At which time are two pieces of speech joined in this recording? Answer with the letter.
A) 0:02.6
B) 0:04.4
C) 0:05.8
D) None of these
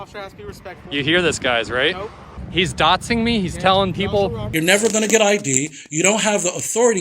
B